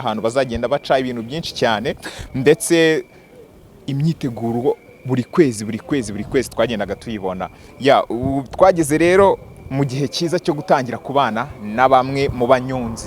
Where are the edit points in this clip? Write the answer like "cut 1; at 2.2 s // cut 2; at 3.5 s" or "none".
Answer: none